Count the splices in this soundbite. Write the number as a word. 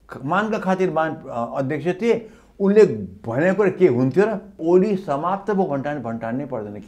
one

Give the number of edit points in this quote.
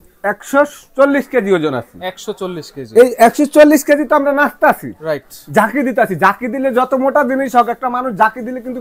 zero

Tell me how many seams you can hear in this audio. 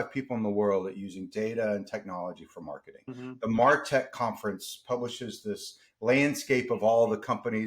one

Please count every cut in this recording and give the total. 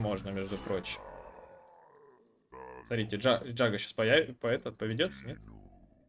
zero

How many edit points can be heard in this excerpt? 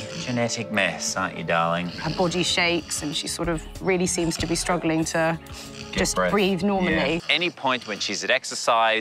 two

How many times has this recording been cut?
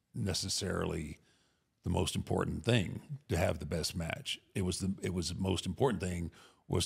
zero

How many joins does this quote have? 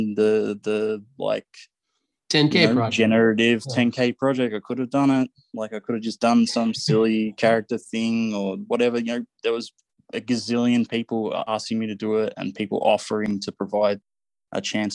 two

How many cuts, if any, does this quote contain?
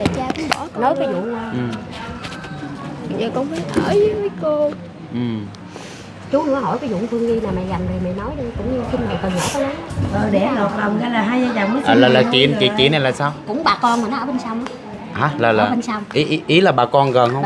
zero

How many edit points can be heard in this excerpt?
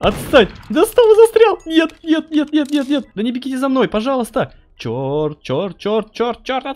one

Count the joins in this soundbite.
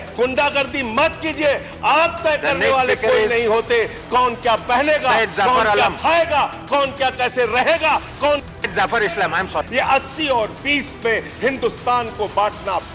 one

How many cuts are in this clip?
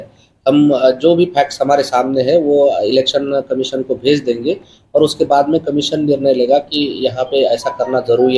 zero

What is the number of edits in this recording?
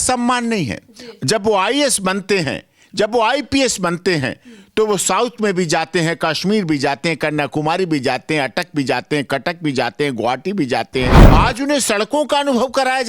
one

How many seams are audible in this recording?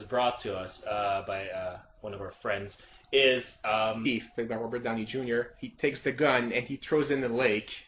zero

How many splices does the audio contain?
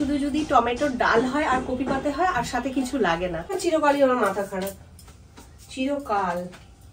one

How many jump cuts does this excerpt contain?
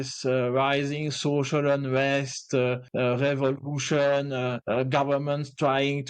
two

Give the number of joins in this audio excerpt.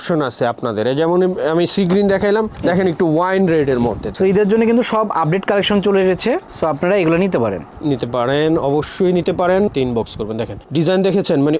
two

